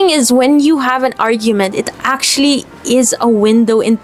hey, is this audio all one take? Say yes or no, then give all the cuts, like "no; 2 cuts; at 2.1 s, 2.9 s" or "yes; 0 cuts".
yes; 0 cuts